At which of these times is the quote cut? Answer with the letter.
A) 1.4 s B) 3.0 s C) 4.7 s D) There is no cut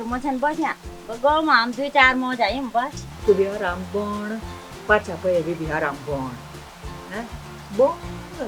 B